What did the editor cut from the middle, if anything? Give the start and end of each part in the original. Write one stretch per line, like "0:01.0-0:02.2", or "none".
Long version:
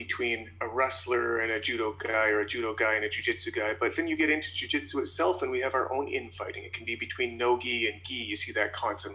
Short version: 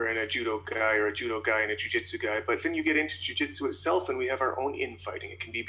none